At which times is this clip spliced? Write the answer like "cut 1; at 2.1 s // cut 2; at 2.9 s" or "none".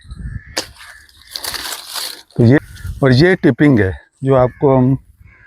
cut 1; at 2.6 s